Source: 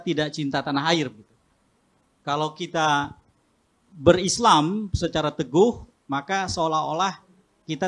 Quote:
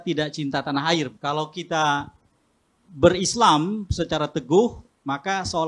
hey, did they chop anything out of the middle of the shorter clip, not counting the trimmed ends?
yes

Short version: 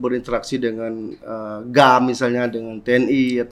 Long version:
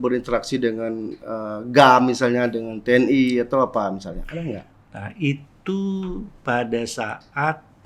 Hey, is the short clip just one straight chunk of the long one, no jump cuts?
yes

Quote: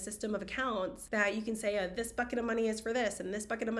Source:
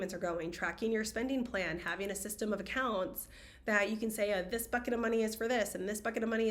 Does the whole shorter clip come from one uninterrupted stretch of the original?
no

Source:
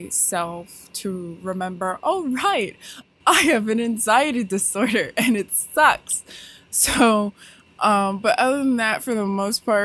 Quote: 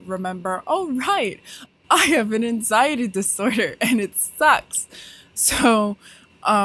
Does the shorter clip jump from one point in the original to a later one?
no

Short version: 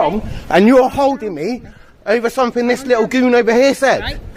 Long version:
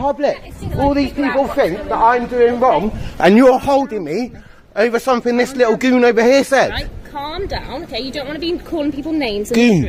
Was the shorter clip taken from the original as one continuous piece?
yes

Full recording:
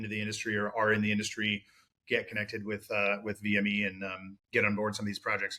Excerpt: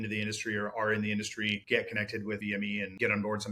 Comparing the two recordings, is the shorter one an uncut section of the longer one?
no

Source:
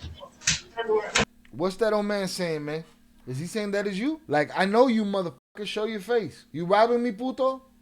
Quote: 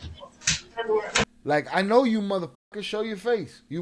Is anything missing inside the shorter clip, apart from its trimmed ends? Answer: yes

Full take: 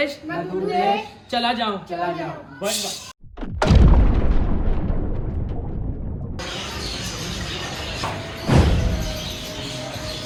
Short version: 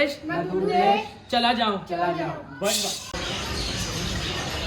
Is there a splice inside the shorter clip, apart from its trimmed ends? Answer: yes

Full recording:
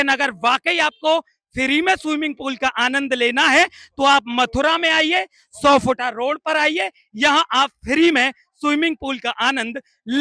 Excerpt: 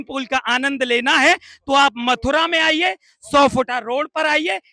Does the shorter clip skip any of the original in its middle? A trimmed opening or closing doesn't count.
no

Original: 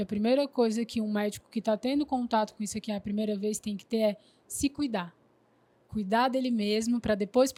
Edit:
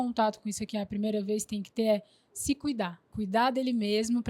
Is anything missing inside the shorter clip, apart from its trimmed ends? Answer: yes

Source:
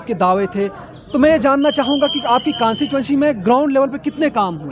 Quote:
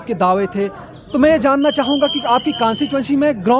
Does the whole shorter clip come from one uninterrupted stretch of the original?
yes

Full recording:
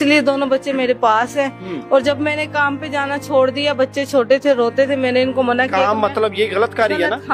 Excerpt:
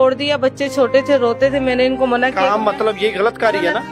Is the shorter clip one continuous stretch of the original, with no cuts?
yes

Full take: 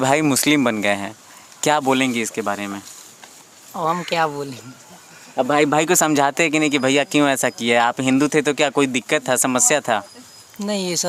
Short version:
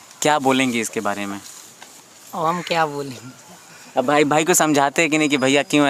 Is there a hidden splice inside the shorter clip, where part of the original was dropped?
no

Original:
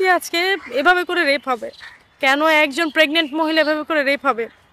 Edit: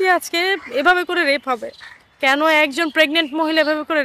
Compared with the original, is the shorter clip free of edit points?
yes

